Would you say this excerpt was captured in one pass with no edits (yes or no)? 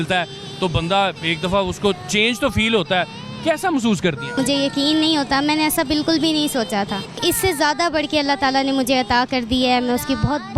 no